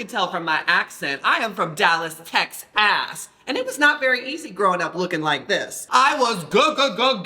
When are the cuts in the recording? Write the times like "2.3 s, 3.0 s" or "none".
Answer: 5.7 s